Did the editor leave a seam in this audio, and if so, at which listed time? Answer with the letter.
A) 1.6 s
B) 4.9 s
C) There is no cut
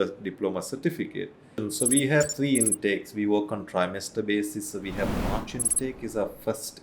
A